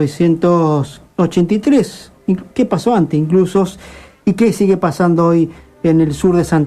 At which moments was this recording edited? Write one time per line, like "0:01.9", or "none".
0:03.7